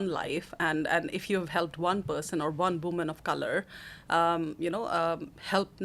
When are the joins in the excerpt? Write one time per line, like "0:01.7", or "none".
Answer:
none